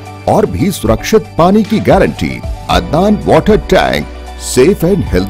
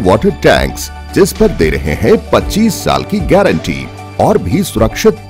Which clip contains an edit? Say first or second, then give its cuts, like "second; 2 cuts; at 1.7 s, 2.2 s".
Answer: first; 1 cut; at 2.5 s